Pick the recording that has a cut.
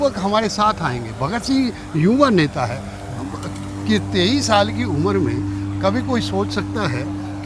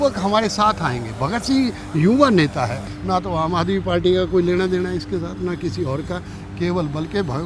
second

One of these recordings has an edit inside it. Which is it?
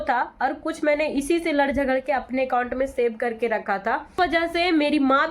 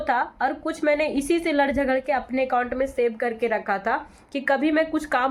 first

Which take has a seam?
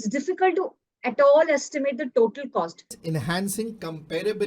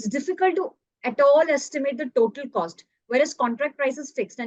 first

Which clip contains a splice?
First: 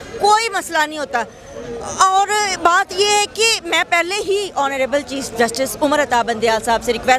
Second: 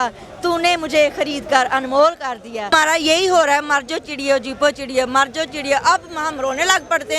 second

